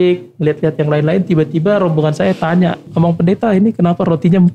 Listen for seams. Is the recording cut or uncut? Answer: cut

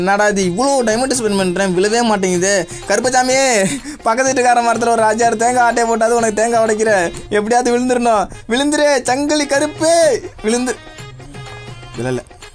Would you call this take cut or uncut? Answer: uncut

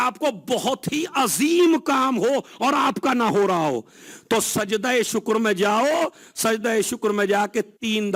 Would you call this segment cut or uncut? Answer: uncut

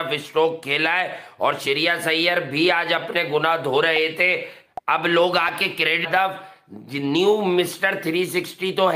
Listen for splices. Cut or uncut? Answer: cut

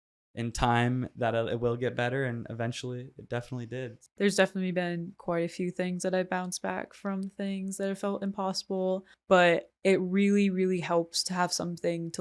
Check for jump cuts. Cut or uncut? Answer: cut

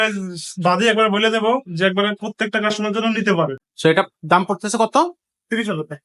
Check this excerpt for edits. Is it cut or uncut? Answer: cut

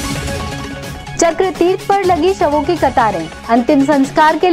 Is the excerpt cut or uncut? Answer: cut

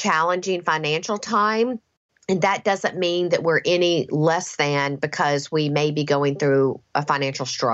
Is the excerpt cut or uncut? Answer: uncut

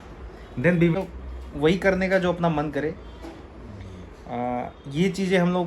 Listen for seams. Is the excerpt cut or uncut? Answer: cut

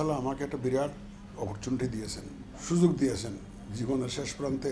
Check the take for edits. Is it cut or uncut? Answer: uncut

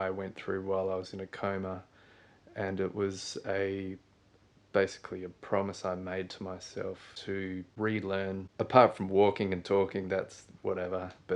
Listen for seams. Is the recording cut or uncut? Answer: cut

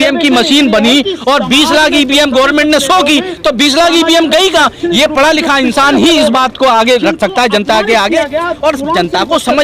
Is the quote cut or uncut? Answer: uncut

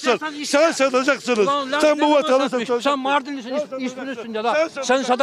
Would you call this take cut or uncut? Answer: uncut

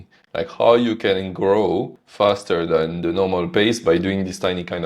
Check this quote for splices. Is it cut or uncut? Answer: cut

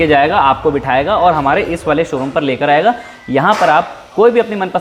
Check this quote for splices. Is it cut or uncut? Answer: uncut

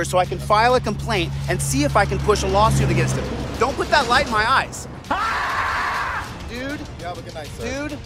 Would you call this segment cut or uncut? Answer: uncut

